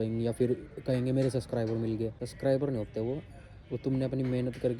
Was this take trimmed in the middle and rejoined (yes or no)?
yes